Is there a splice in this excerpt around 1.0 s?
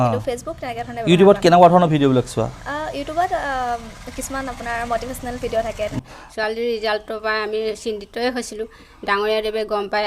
no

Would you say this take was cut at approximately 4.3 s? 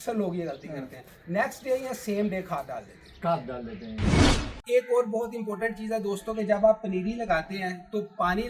yes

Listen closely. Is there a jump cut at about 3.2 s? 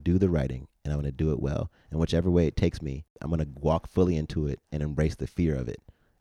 yes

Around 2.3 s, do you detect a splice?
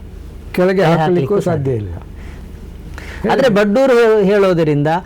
yes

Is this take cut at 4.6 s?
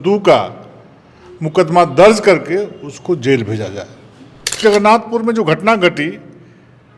yes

